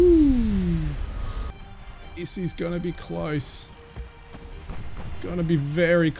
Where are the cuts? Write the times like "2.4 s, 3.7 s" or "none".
1.5 s